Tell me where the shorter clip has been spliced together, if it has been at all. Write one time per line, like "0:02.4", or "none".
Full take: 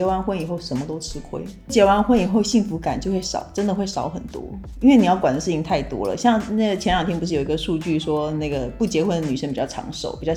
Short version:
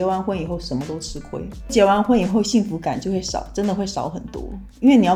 none